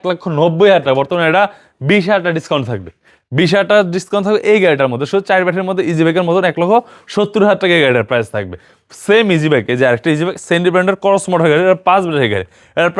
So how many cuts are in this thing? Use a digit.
0